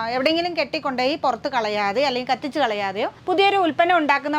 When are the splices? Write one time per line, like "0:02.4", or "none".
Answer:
0:03.2